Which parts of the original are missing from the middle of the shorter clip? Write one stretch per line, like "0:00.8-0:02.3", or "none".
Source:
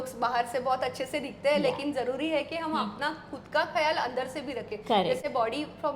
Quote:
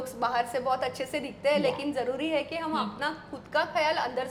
none